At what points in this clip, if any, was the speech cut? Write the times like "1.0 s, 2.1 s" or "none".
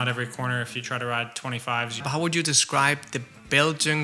2.0 s